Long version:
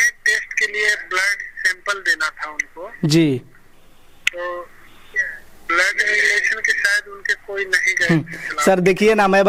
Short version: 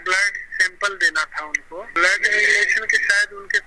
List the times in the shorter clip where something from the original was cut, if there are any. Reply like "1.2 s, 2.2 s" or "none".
1.9 s